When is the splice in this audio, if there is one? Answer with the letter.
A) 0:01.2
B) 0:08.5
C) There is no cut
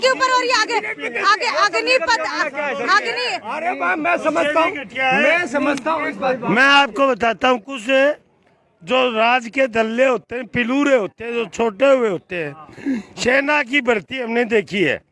C